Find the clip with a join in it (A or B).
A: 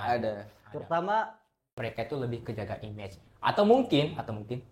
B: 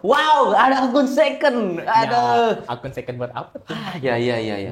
A